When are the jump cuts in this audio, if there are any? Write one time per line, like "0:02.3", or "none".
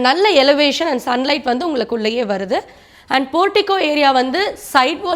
none